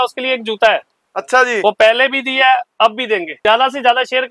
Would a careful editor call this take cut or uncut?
cut